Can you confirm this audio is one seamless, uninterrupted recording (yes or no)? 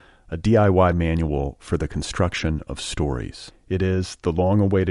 yes